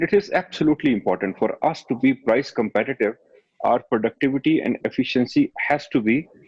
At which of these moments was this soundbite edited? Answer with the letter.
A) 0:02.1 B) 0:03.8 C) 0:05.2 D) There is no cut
D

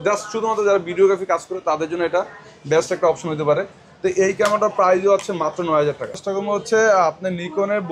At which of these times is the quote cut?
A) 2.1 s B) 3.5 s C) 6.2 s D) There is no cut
C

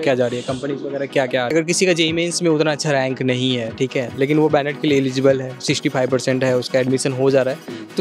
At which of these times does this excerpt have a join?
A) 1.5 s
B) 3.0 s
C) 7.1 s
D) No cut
A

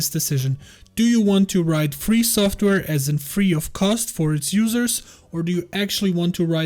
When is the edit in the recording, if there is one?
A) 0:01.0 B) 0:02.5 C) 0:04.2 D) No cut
D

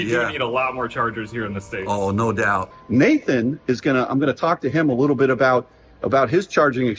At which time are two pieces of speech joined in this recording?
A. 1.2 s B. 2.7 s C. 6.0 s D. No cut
B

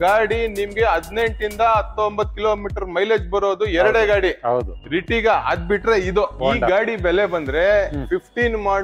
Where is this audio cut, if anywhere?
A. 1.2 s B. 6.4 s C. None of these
B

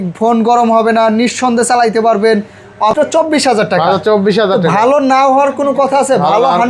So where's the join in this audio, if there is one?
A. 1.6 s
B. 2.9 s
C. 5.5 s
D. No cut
B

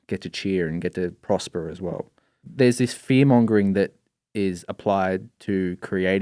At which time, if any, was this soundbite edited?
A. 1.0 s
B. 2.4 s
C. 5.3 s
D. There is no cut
B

